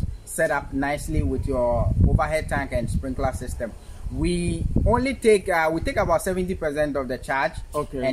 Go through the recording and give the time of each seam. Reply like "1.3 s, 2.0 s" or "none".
none